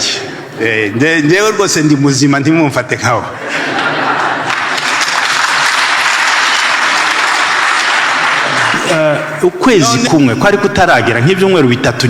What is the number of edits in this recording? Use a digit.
1